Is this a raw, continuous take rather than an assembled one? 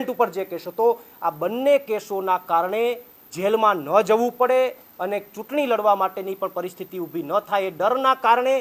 yes; 0 cuts

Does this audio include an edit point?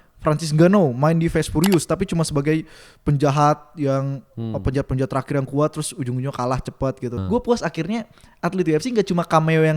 yes; 1 cut; at 7.2 s

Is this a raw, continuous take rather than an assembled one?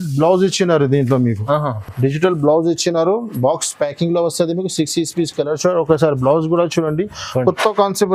yes; 0 cuts

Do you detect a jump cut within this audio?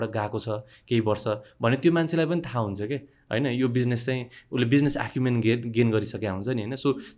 no; 0 cuts

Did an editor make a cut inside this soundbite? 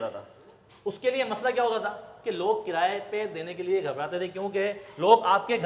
no; 0 cuts

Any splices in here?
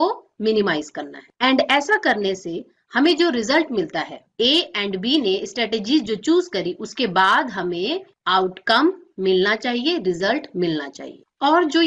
no; 0 cuts

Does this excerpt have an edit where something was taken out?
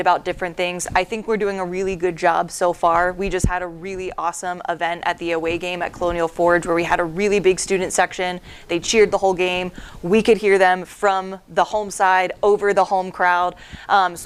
no; 0 cuts

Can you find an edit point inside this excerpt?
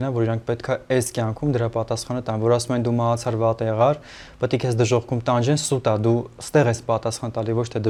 no; 0 cuts

